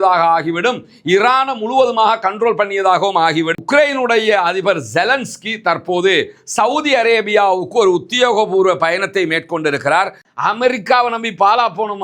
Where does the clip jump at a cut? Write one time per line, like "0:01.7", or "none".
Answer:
0:03.6
0:10.2